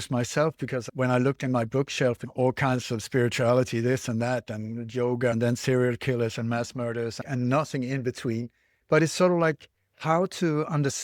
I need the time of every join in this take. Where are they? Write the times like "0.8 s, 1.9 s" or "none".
0.9 s, 2.2 s, 5.3 s, 7.2 s, 8.7 s